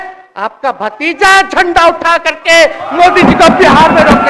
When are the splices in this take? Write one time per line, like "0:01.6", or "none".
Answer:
none